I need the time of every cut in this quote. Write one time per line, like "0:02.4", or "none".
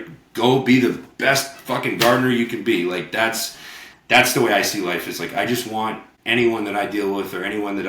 0:06.1

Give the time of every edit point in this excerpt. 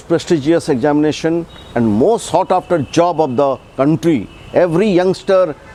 none

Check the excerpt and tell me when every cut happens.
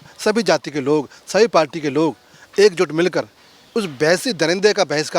none

